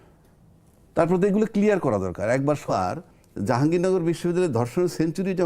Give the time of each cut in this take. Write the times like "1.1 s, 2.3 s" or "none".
2.7 s